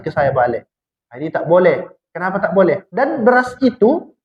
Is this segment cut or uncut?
cut